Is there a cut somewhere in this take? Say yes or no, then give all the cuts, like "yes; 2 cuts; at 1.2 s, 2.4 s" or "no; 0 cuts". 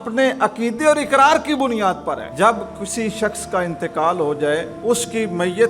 yes; 2 cuts; at 2.3 s, 4.7 s